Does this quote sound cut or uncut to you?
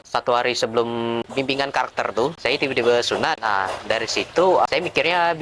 cut